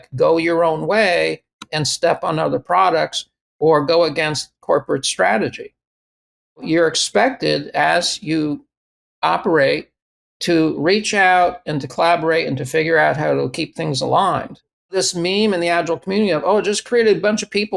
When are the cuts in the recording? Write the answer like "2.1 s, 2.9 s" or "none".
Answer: none